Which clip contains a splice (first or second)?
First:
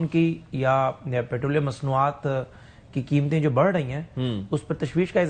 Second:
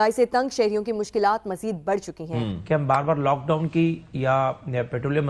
second